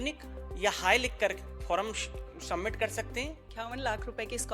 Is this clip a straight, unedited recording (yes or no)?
no